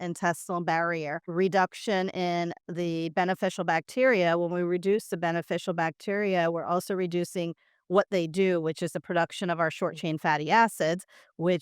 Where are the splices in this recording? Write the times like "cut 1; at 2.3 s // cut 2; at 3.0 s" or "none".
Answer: cut 1; at 1.3 s